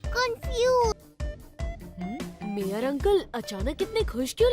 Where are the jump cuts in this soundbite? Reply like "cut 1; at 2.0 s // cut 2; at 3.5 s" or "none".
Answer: cut 1; at 0.9 s